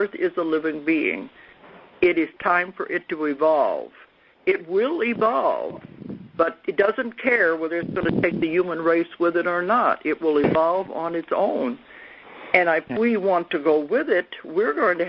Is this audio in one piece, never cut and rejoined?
yes; 0 cuts

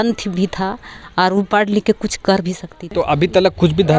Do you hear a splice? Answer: yes; 1 cut; at 2.9 s

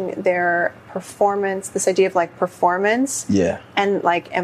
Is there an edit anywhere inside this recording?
no; 0 cuts

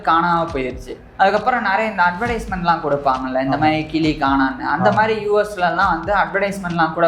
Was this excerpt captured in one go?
no; 1 cut; at 1.0 s

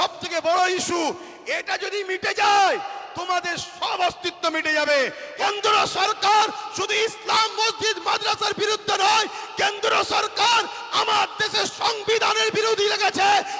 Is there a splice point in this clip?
yes; 1 cut; at 5.3 s

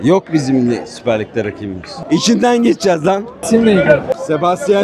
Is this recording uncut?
yes; 0 cuts

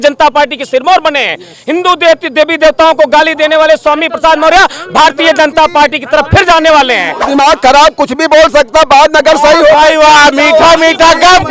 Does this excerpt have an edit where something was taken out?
yes; 1 cut; at 7.1 s

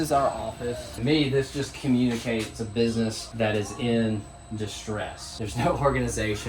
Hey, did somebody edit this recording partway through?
yes; 3 cuts; at 0.9 s, 3.2 s, 5.2 s

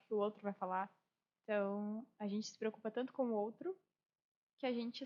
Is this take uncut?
yes; 0 cuts

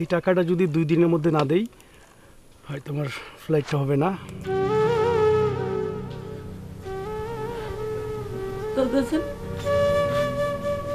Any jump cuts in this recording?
yes; 1 cut; at 4.3 s

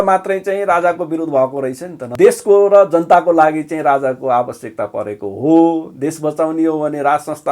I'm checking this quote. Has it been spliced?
yes; 1 cut; at 2.1 s

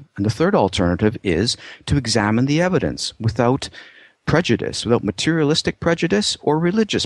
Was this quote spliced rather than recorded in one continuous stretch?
no; 0 cuts

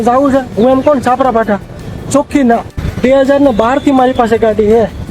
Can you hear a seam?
yes; 1 cut; at 2.8 s

